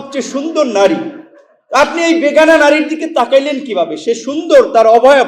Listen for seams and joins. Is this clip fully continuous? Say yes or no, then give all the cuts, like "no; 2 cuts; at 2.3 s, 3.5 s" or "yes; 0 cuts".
yes; 0 cuts